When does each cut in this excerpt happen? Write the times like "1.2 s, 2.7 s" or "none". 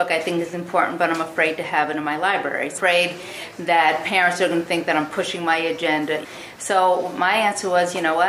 6.2 s